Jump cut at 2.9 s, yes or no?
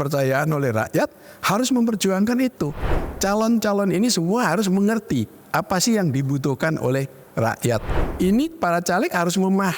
yes